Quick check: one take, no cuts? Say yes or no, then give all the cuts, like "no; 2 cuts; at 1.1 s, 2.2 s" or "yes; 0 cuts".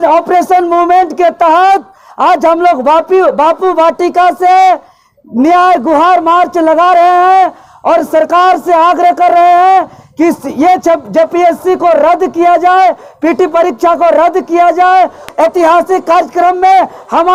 yes; 0 cuts